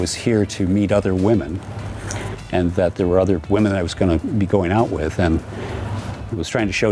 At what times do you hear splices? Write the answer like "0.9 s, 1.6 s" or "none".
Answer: none